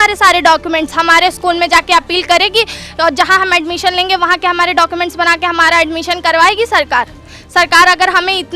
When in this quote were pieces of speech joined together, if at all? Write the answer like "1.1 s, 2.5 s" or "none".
none